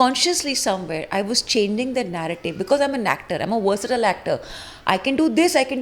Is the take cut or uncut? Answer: uncut